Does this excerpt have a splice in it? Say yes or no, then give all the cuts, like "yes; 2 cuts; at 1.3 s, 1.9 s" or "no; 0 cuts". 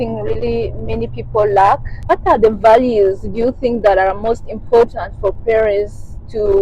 yes; 1 cut; at 2.1 s